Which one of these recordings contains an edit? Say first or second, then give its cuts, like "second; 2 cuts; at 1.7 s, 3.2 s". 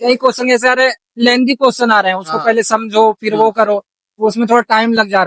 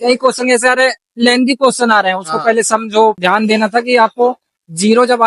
second; 1 cut; at 3.2 s